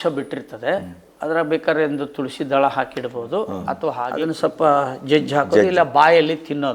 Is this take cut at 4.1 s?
yes; 1 cut; at 4.1 s

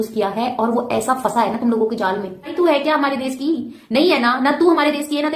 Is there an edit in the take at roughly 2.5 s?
yes; 1 cut; at 2.5 s

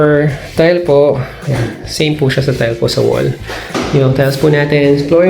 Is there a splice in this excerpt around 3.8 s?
yes; 1 cut; at 3.8 s

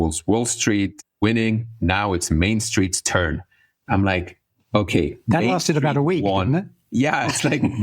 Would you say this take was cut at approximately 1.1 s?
yes; 1 cut; at 1.1 s

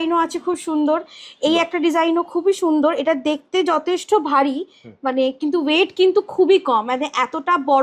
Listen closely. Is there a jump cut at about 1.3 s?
no; 0 cuts

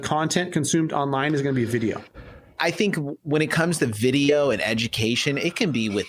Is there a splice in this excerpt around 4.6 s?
no; 1 cut; at 2.5 s

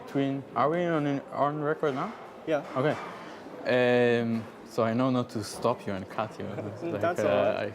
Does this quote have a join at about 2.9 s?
no; 1 cut; at 4.2 s

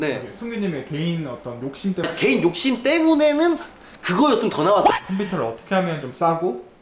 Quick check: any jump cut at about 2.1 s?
yes; 2 cuts; at 2.1 s, 4.9 s

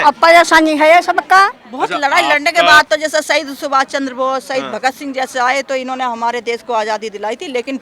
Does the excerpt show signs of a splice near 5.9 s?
no; 1 cut; at 1.6 s

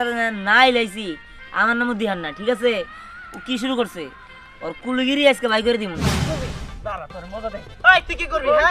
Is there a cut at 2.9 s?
no; 1 cut; at 6.3 s

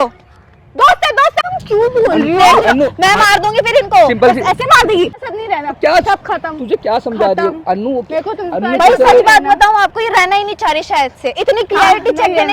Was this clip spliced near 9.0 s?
no; 2 cuts; at 1.5 s, 5.1 s

